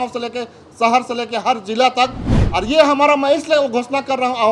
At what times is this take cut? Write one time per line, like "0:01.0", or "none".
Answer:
0:02.4

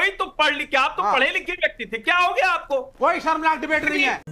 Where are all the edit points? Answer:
none

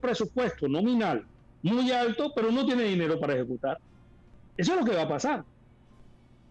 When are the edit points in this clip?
none

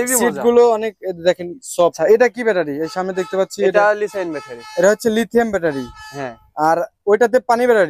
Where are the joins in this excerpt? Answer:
0:02.0

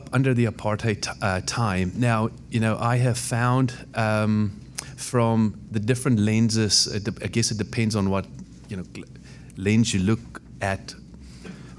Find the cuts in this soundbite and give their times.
none

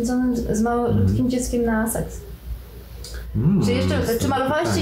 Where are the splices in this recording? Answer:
none

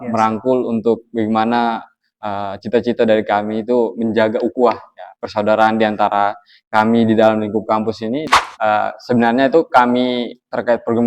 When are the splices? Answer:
0:08.4

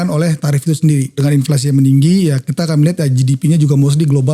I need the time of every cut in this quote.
0:01.2

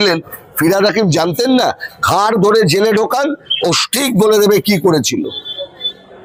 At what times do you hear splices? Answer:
none

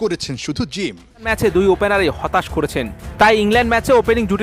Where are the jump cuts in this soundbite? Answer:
0:01.3

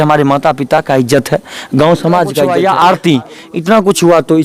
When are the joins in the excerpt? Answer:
0:02.6

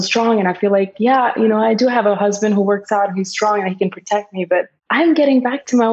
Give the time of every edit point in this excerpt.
0:04.8

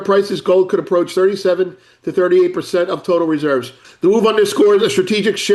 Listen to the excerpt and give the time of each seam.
0:03.8

